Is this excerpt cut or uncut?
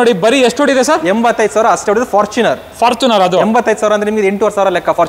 uncut